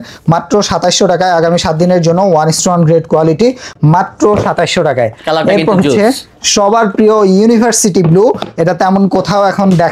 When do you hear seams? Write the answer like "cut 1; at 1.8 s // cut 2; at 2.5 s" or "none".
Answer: none

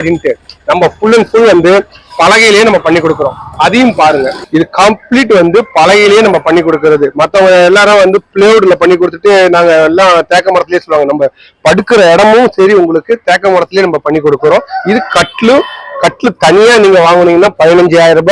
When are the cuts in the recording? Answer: none

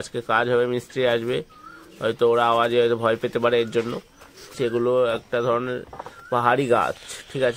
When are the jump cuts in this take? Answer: cut 1; at 4.6 s

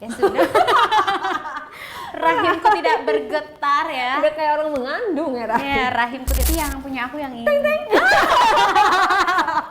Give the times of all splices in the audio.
cut 1; at 6.4 s

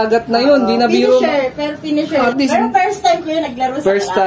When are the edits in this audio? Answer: cut 1; at 2.3 s

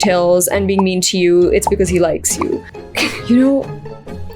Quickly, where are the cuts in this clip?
cut 1; at 2.7 s

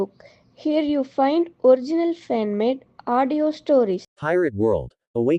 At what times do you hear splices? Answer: cut 1; at 4.1 s

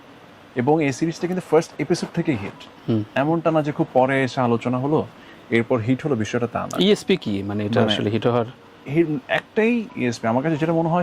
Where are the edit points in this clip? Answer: none

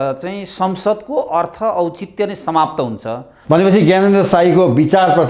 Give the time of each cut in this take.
cut 1; at 3.3 s

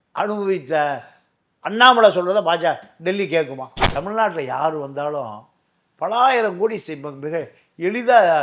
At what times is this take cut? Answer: cut 1; at 3.8 s

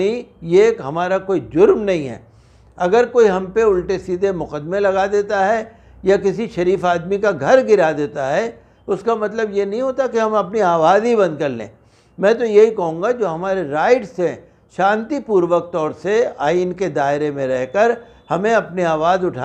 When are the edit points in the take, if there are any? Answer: none

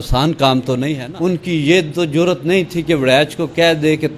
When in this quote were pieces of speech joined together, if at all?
cut 1; at 1.0 s

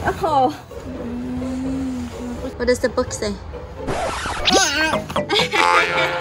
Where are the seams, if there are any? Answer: cut 1; at 2.4 s

